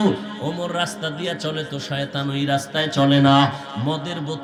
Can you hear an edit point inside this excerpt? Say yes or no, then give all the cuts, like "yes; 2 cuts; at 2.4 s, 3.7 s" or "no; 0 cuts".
no; 0 cuts